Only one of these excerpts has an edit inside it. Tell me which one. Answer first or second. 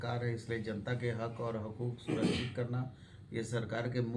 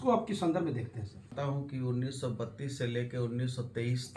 second